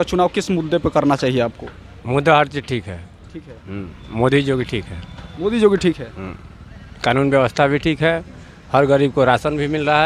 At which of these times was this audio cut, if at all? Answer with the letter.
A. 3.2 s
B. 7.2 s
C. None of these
C